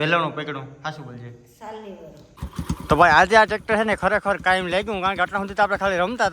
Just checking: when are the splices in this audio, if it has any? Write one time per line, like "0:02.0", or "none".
0:02.4